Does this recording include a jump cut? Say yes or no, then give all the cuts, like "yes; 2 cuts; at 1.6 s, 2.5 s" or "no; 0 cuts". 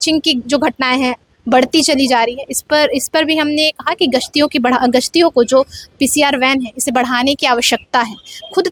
no; 0 cuts